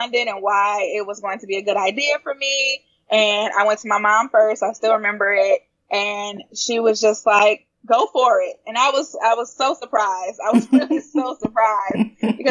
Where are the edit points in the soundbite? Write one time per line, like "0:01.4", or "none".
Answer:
0:07.7